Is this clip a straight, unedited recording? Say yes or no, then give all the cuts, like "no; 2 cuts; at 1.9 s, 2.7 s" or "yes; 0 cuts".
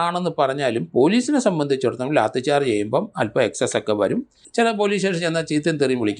no; 1 cut; at 4.4 s